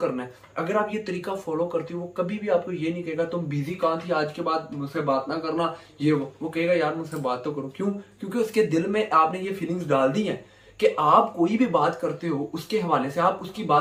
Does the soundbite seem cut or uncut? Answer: uncut